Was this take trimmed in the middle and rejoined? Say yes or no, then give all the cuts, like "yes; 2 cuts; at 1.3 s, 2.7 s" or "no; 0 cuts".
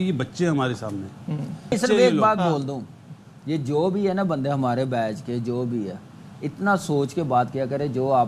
yes; 1 cut; at 1.8 s